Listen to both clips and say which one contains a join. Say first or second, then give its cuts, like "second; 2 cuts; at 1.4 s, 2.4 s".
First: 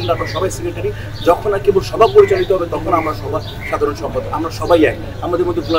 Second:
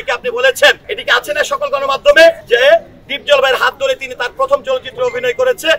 second; 2 cuts; at 0.9 s, 2.4 s